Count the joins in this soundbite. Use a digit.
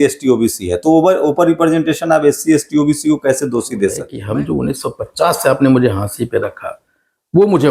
1